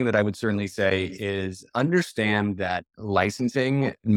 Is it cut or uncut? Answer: uncut